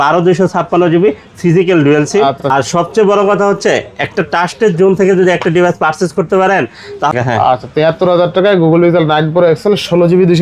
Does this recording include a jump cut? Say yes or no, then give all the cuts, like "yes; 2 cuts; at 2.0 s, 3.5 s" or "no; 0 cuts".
yes; 2 cuts; at 2.4 s, 7.1 s